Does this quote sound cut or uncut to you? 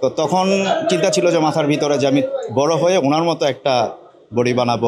uncut